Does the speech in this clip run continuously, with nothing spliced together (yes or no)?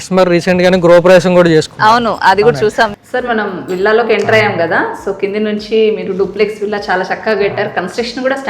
yes